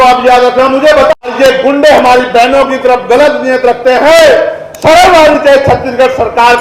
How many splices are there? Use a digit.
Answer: 1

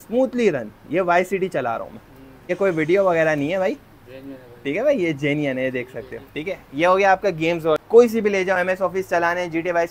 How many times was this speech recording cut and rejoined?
2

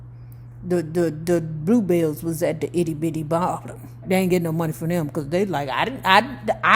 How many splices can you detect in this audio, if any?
1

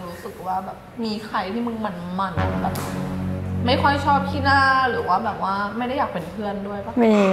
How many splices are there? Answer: 0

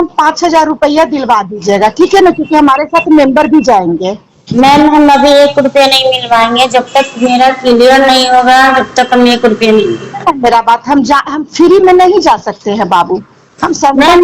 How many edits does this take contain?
0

